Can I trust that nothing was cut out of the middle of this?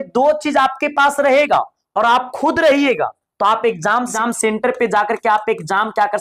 no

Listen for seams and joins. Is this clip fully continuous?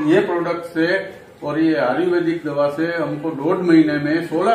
yes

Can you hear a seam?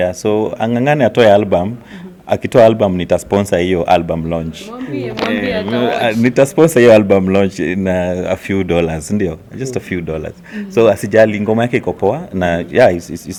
no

